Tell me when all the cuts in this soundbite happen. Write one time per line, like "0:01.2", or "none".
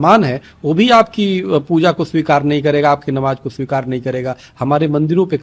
none